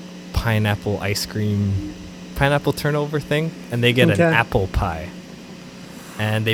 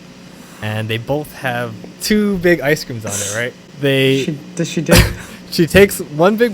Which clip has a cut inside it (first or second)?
second